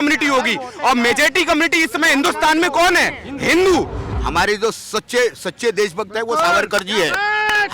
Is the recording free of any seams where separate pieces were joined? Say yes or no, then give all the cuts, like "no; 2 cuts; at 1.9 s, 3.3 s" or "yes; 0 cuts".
no; 1 cut; at 4.0 s